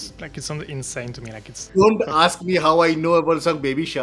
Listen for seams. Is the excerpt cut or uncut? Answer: cut